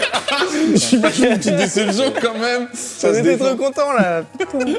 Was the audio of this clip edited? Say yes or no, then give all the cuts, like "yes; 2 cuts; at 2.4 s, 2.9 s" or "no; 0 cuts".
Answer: yes; 2 cuts; at 0.8 s, 3.0 s